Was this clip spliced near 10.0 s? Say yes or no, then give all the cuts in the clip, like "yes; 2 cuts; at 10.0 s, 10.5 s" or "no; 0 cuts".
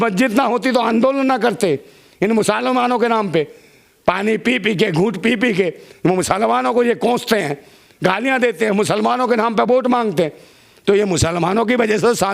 no; 0 cuts